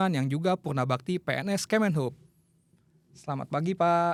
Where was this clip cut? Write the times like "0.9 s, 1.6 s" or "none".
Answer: none